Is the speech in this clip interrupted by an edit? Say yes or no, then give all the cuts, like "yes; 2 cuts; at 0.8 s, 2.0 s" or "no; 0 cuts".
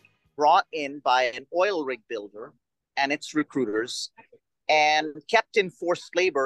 no; 0 cuts